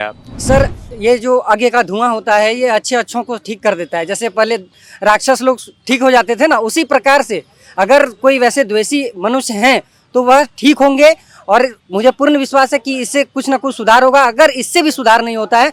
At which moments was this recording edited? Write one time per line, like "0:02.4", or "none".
none

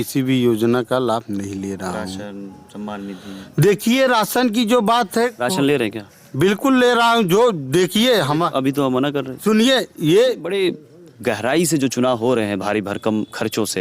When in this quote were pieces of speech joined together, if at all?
0:10.5

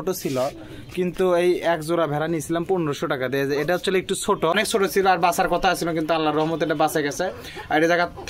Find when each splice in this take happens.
0:04.5

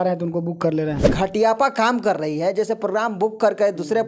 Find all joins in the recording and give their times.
0:01.1

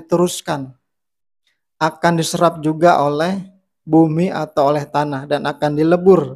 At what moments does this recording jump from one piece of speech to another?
none

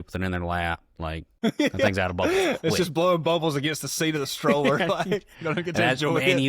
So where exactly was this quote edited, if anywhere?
0:01.3

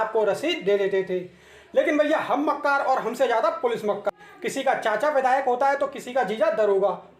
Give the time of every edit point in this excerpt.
0:04.2

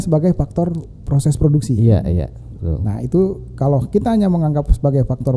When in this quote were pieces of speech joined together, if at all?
none

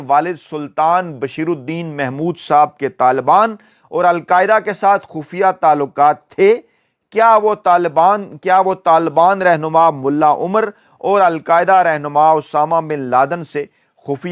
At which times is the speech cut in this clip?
none

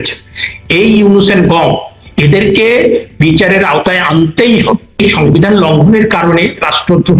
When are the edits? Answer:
0:05.0

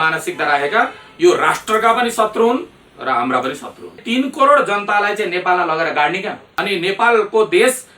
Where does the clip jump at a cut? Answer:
0:04.0
0:06.5

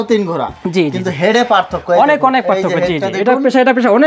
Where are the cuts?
none

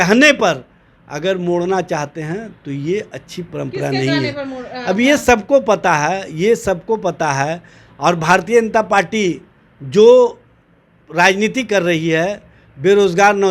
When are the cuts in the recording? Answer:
none

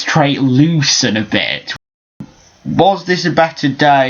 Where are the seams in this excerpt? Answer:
0:02.1

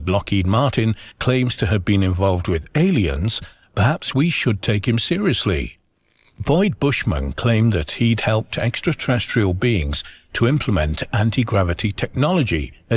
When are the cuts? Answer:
0:01.1

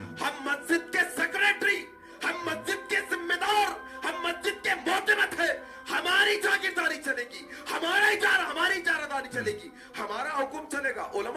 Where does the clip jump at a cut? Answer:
none

